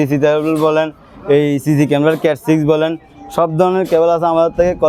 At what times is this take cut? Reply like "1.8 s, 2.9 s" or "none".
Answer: none